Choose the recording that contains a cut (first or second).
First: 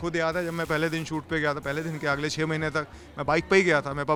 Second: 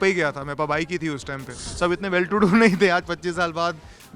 second